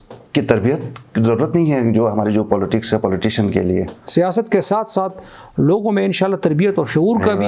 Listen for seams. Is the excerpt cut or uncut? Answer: cut